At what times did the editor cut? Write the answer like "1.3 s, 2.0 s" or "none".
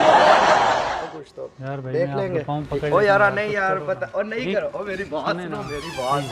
0.9 s